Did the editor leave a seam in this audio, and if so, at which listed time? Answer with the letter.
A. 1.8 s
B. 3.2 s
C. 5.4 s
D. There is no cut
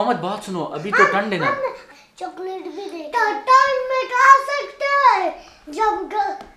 A